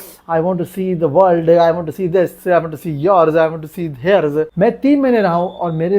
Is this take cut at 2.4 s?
no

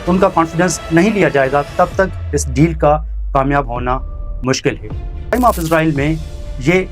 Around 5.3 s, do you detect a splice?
yes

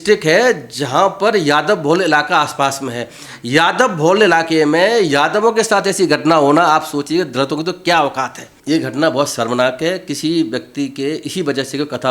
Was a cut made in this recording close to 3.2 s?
no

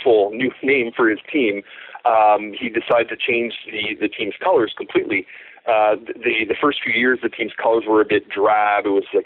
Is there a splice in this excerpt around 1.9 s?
no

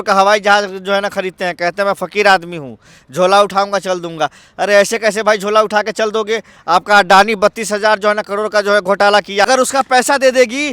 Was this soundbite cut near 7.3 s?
no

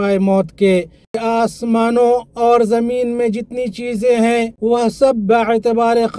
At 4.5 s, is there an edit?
yes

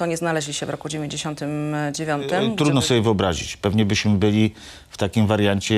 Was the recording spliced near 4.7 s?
no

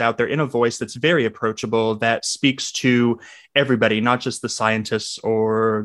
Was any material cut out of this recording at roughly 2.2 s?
yes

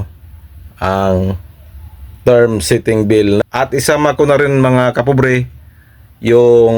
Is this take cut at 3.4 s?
yes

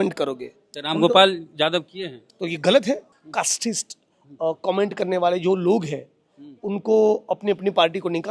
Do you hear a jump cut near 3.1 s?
yes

